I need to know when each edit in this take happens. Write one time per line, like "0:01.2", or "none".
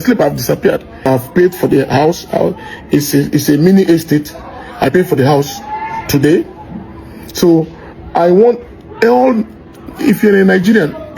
0:01.0

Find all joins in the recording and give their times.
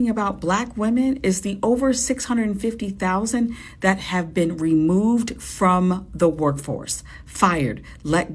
none

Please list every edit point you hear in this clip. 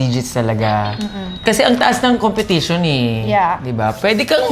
none

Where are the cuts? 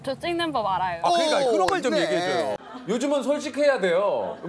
0:02.6

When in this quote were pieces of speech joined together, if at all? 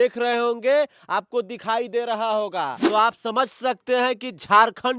0:02.8

